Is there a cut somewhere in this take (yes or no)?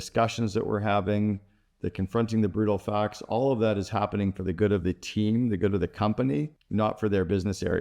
yes